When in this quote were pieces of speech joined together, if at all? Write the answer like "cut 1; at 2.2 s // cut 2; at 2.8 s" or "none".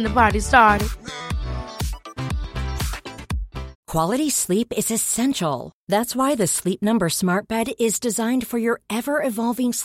cut 1; at 3.7 s